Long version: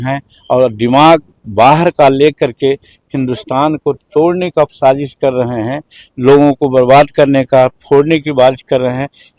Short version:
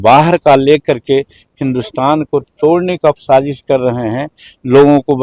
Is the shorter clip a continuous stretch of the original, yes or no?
yes